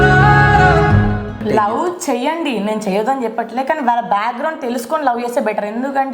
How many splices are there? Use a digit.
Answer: 1